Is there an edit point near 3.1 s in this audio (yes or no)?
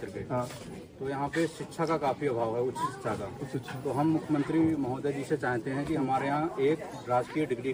no